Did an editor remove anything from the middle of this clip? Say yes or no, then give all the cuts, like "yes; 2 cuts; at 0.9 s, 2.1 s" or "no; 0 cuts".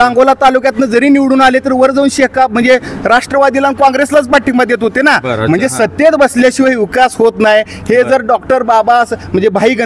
no; 0 cuts